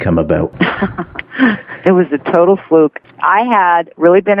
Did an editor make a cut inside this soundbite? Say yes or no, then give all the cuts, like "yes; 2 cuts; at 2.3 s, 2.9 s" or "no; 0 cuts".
yes; 1 cut; at 3.1 s